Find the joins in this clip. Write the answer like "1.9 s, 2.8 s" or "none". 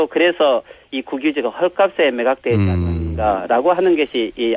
2.9 s